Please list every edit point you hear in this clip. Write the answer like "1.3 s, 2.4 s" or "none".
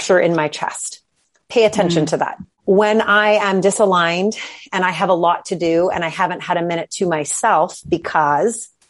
2.5 s